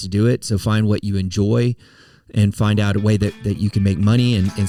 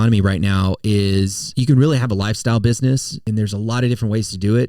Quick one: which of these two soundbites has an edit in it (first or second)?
second